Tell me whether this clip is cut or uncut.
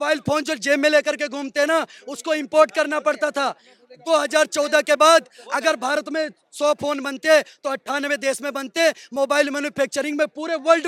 uncut